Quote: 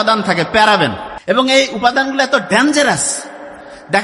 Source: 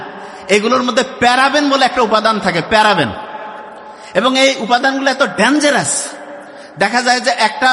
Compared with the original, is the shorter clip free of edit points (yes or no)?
no